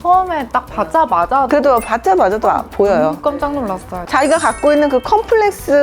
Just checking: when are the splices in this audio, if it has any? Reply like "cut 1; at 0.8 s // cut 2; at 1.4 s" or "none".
cut 1; at 4.0 s